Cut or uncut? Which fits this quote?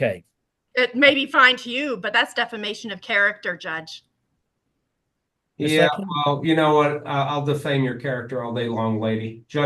uncut